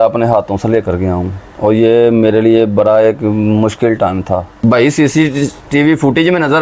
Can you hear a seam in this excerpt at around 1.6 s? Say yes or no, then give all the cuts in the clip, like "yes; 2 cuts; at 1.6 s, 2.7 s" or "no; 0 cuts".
no; 1 cut; at 4.5 s